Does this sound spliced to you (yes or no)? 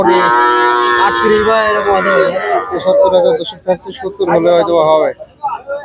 yes